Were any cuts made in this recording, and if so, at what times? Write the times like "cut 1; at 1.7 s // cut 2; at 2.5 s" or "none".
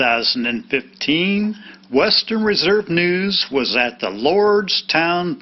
none